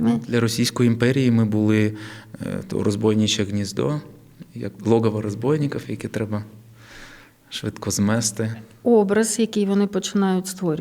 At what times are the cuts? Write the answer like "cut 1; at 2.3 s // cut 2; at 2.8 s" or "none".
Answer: none